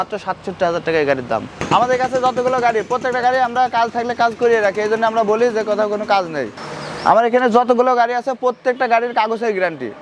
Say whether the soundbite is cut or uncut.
cut